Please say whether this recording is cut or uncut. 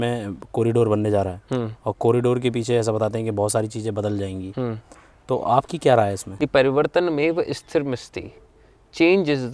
cut